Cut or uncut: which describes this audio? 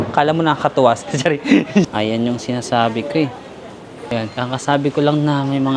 cut